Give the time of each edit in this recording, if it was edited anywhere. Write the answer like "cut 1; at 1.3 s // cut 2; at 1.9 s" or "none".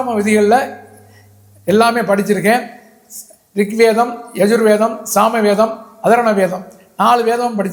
none